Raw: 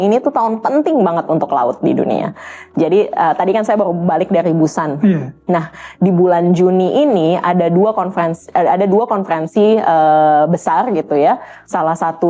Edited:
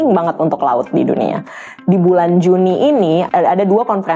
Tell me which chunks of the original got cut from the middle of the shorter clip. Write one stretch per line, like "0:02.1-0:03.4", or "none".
0:02.6-0:05.8
0:07.4-0:08.5